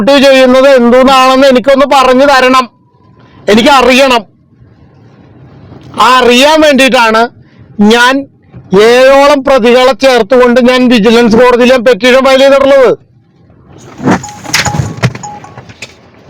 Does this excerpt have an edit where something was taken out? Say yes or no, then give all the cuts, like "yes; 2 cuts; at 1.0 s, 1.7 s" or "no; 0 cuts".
no; 0 cuts